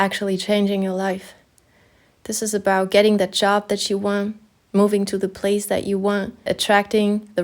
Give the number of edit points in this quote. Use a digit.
1